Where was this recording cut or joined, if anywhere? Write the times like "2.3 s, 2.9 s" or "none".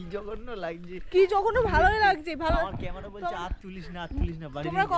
none